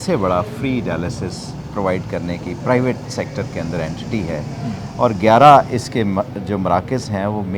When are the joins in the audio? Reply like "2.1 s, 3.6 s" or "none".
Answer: none